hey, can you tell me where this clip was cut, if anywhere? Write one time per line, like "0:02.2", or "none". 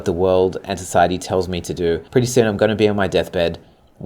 0:02.0